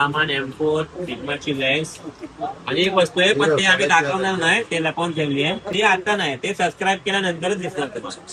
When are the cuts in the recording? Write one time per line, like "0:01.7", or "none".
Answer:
0:05.6